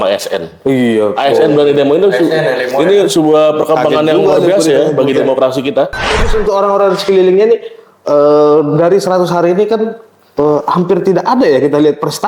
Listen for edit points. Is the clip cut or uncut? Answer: cut